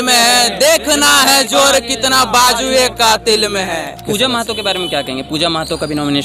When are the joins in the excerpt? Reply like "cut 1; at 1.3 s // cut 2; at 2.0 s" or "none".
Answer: cut 1; at 4.0 s